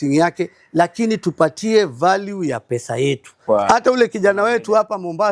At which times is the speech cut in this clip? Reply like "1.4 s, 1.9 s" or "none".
3.4 s

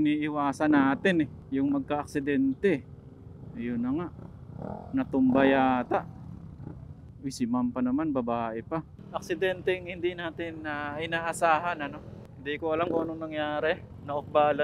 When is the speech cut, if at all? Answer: none

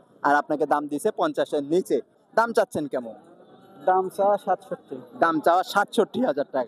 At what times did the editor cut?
2.2 s

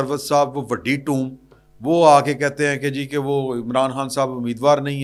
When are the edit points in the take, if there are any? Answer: none

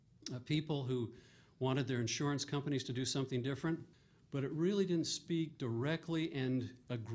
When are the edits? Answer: 2.0 s

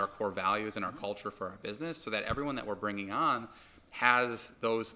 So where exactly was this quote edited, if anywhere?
none

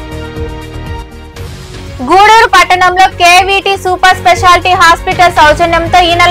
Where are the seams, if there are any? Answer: 0.9 s

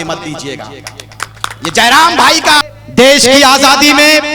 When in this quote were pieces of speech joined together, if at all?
2.6 s

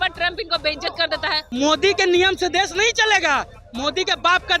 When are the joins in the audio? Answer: 1.4 s

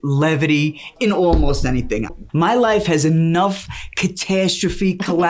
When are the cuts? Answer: 0.9 s, 2.1 s

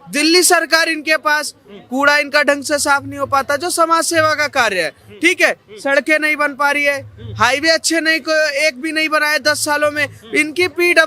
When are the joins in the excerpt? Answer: none

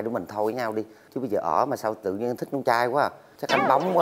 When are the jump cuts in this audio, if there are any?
none

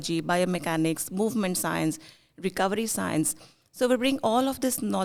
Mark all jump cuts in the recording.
none

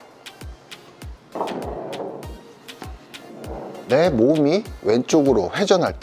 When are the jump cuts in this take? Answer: 3.7 s

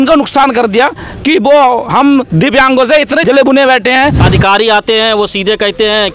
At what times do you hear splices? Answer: 3.2 s, 4.2 s

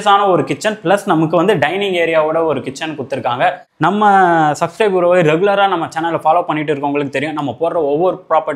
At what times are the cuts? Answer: 3.7 s

